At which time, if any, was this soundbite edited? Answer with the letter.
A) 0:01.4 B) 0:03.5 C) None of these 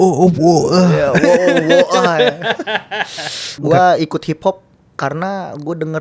B